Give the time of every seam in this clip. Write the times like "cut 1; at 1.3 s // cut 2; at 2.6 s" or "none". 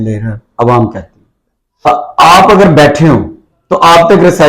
cut 1; at 1.9 s